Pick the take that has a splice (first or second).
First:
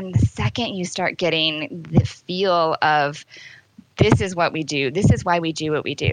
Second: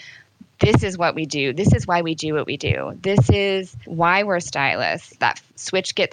second